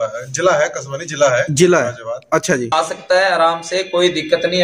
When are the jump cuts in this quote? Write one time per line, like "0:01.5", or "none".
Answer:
0:02.7